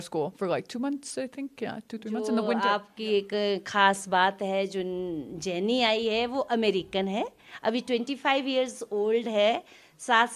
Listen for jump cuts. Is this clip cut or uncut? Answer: cut